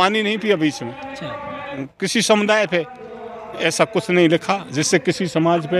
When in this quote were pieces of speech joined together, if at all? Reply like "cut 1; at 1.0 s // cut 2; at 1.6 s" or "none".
cut 1; at 1.8 s